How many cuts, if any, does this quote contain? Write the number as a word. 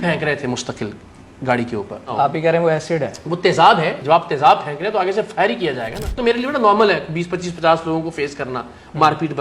three